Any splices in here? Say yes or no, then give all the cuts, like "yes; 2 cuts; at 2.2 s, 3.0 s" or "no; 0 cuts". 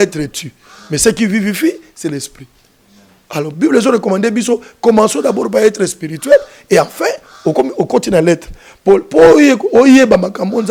no; 0 cuts